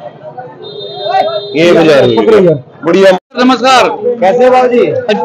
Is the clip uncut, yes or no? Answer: no